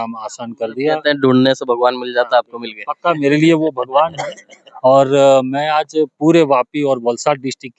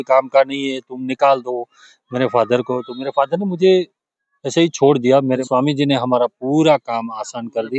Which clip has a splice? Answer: second; 1 cut; at 5.4 s

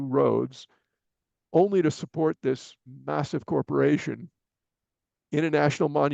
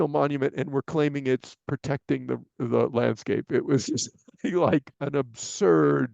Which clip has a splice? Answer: second; 1 cut; at 4.9 s

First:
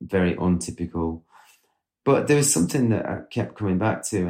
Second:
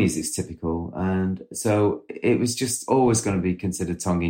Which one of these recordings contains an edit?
second; 2 cuts; at 1.5 s, 2.8 s

